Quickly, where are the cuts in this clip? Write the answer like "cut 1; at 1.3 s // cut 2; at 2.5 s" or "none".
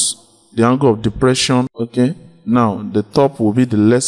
cut 1; at 1.7 s